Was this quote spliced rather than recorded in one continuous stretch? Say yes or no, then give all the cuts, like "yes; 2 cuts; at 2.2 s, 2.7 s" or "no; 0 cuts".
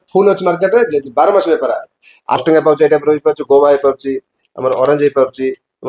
yes; 1 cut; at 2.4 s